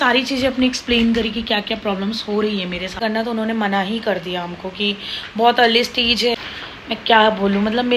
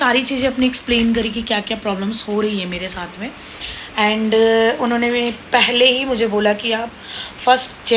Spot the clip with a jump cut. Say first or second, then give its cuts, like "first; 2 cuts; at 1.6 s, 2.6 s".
first; 2 cuts; at 3.0 s, 6.3 s